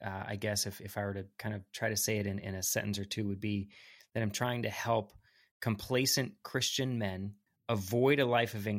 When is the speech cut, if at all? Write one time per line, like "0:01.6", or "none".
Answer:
0:07.5